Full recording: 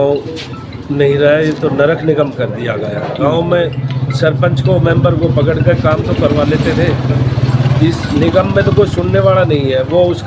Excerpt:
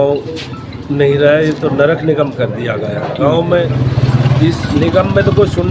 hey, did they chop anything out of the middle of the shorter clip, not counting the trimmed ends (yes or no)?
yes